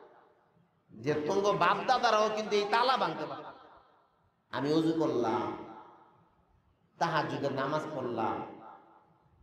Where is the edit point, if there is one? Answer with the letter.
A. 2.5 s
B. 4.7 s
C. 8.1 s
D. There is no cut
D